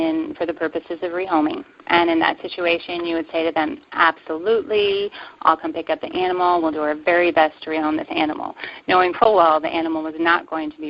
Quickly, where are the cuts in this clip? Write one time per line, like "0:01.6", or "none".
none